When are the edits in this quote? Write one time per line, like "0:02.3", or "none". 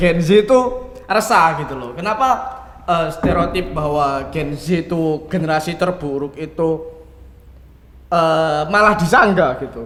none